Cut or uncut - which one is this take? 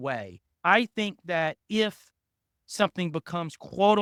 uncut